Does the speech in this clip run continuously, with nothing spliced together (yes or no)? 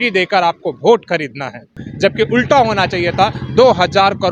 no